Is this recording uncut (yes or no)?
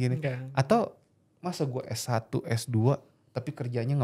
yes